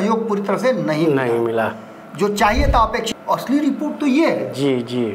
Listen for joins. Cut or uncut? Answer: cut